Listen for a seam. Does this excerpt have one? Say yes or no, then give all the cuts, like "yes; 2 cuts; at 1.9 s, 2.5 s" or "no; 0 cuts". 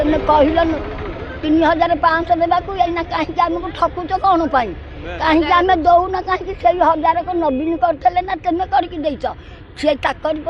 no; 0 cuts